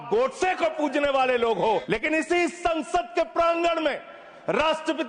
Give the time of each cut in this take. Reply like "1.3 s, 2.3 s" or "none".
1.8 s